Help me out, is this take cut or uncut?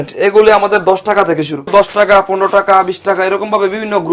cut